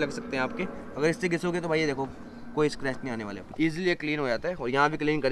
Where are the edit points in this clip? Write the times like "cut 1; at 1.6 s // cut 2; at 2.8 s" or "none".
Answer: cut 1; at 3.4 s